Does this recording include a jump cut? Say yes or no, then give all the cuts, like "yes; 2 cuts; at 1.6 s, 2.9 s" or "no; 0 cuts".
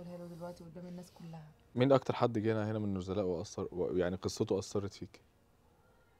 yes; 1 cut; at 1.7 s